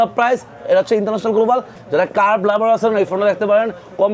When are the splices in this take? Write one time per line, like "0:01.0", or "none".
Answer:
0:01.7